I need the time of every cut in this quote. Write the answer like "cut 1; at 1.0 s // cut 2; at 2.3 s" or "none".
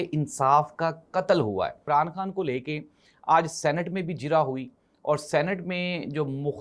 cut 1; at 1.8 s